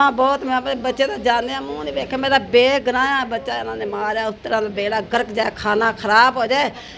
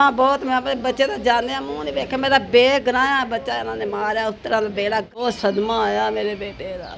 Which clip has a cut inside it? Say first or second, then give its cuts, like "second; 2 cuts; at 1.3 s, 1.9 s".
second; 1 cut; at 5.1 s